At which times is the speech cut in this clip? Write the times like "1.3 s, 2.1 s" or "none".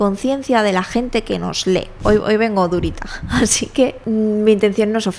1.9 s, 4.0 s

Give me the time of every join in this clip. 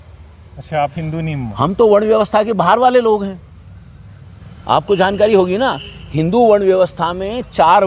none

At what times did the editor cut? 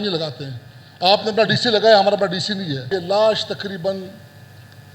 2.8 s

